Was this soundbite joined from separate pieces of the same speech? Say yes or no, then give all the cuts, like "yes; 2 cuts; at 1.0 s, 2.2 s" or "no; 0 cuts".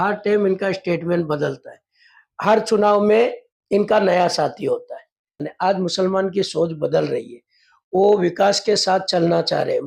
yes; 1 cut; at 5.5 s